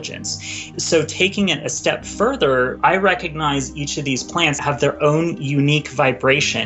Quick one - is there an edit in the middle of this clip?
yes; 3 cuts; at 0.8 s, 2.7 s, 4.6 s

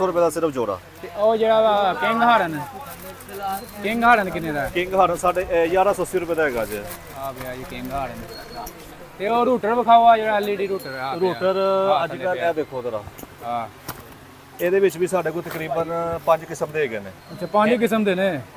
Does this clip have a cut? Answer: no; 0 cuts

